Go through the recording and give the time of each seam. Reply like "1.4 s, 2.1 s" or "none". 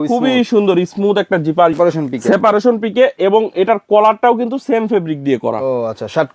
1.7 s